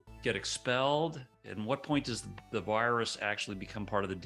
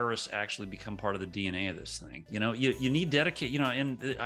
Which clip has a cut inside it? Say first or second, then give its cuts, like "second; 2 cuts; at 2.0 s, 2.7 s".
second; 1 cut; at 2.3 s